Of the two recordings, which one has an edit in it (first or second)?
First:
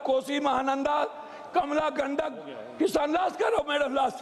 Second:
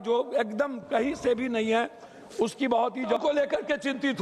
second